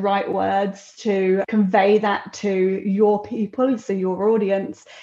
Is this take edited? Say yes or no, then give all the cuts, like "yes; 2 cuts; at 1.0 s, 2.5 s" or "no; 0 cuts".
yes; 1 cut; at 1.5 s